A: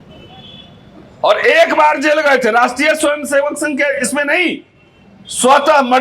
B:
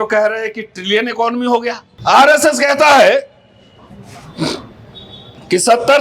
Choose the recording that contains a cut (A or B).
B